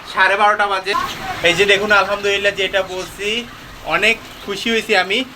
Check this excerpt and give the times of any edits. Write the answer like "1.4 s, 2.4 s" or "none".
0.9 s